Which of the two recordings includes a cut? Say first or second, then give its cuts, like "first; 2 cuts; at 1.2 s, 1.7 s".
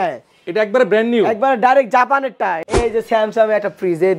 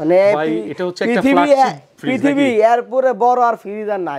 first; 1 cut; at 2.8 s